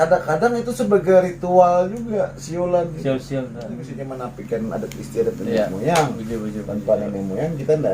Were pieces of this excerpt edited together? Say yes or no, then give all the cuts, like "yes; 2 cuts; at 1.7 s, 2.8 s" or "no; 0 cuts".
yes; 1 cut; at 3.9 s